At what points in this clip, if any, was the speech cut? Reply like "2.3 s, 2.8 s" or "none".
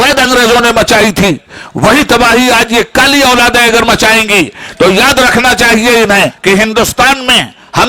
6.4 s